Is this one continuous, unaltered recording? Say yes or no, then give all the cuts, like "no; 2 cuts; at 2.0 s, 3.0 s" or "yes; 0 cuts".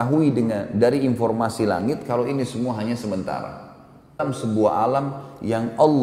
no; 1 cut; at 4.2 s